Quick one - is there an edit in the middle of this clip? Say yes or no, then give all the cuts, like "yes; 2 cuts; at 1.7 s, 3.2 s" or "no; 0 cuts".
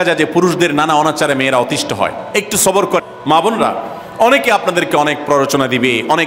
yes; 1 cut; at 3.1 s